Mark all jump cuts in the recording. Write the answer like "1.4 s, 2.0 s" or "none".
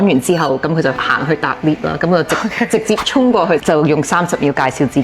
1.1 s